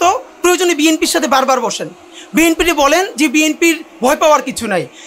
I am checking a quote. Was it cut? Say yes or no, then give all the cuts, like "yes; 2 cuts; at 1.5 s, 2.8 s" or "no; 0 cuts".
no; 0 cuts